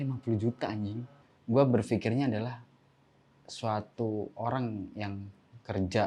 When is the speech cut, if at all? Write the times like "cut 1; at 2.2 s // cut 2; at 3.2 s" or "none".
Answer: cut 1; at 1.1 s